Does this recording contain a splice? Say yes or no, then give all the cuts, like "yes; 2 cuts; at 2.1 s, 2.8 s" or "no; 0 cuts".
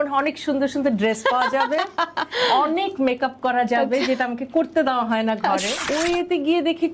yes; 1 cut; at 5.8 s